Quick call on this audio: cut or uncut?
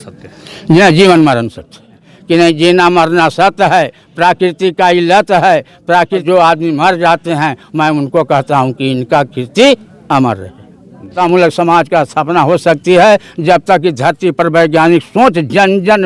cut